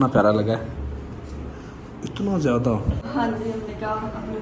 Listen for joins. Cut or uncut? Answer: cut